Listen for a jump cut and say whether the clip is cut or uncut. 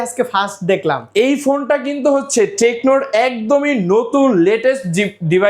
uncut